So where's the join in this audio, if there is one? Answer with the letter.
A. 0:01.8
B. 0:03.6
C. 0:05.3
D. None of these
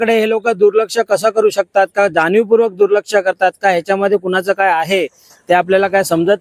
D